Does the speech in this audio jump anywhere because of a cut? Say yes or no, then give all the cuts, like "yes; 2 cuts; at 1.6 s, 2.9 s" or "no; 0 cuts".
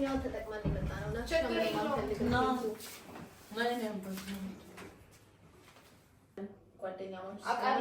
yes; 1 cut; at 6.4 s